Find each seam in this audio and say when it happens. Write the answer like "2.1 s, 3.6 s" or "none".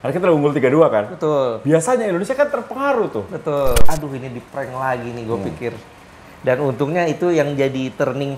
3.9 s